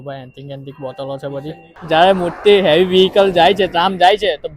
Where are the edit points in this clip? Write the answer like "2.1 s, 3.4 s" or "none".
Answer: 1.8 s

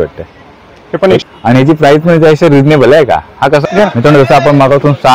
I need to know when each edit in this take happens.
1.2 s, 3.6 s

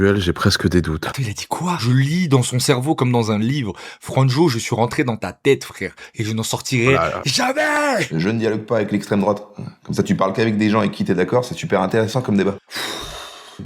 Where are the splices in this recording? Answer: 1.8 s, 8.1 s

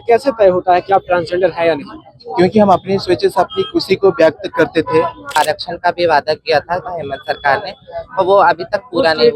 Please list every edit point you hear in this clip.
5.4 s

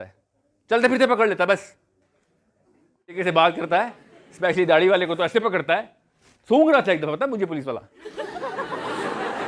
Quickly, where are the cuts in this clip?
3.1 s

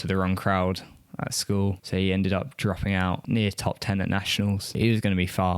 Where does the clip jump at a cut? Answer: 3.2 s, 4.7 s

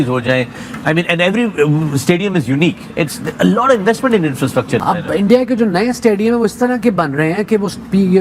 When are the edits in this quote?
4.8 s

